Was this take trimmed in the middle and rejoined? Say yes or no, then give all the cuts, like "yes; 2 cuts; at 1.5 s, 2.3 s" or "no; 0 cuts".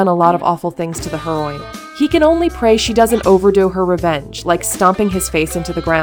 no; 0 cuts